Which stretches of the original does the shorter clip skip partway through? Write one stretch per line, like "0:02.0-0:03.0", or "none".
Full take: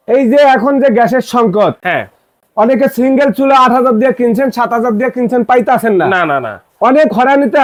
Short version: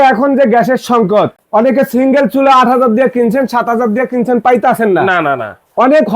0:01.8-0:02.4